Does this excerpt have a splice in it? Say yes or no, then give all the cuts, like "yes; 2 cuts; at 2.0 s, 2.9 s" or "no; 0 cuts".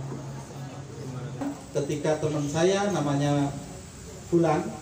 yes; 1 cut; at 1.4 s